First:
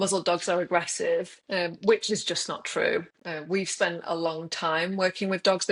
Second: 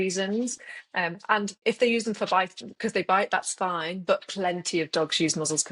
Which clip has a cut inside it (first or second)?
second